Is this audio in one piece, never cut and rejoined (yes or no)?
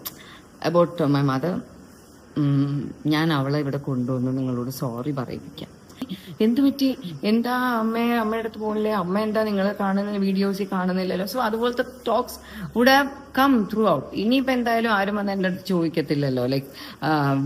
no